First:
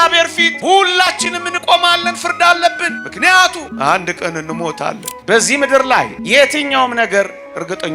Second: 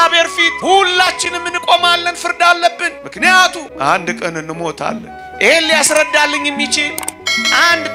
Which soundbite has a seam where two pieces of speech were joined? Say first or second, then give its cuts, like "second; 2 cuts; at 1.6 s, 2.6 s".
first; 1 cut; at 5.1 s